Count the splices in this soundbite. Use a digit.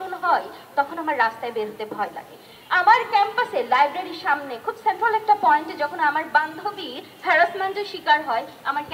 0